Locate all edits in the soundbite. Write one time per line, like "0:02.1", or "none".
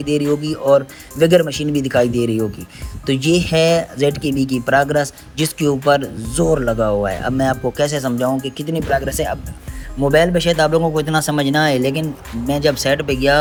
none